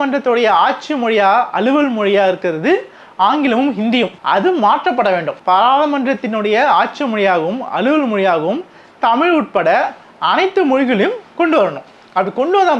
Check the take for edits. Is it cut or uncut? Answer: uncut